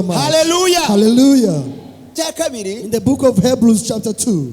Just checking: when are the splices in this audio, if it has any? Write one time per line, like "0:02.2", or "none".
0:02.1

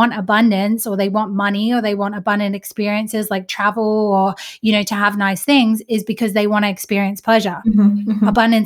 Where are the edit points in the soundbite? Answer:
none

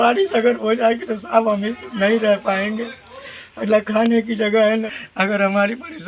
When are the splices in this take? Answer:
0:04.9

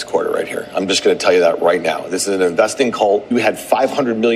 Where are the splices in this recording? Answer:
0:03.3

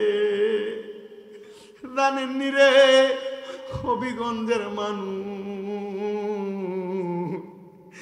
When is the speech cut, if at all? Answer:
0:01.7

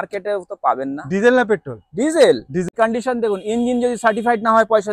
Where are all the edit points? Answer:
0:02.7

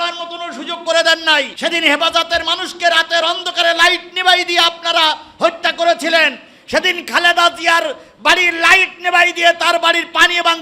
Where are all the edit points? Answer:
0:01.5

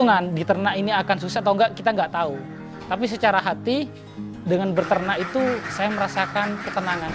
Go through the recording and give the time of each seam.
none

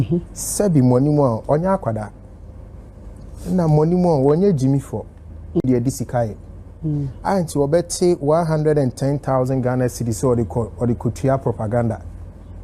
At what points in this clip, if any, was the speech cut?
none

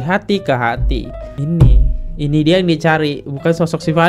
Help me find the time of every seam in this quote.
none

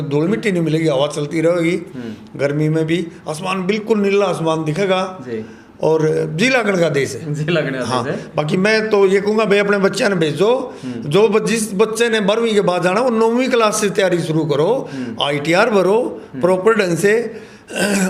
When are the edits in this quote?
none

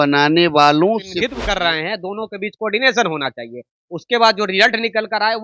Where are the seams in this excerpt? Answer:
0:01.1

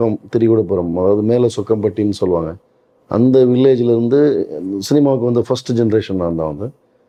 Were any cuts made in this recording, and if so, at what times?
none

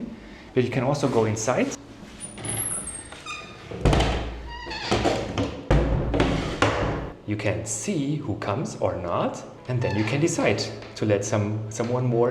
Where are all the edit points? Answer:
0:09.5

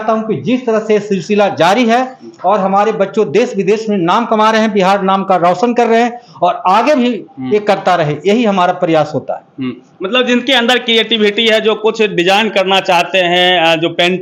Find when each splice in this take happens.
none

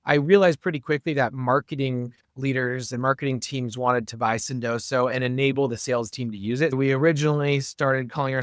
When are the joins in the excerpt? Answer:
0:06.7

